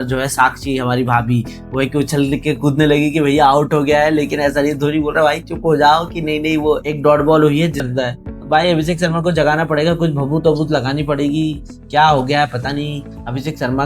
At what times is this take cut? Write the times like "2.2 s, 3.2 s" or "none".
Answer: 7.9 s